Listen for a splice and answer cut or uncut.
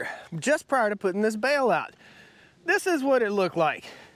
uncut